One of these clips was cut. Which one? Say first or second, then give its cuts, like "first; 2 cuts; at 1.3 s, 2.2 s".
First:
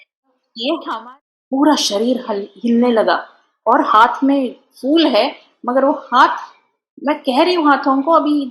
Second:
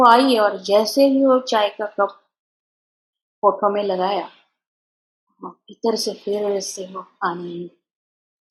first; 1 cut; at 0.9 s